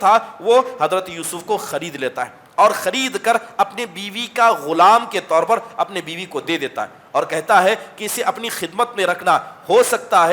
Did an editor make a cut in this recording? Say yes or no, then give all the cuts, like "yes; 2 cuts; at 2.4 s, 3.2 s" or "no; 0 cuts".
no; 0 cuts